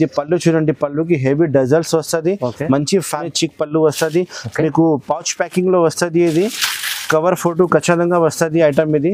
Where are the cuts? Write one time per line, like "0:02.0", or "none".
0:03.3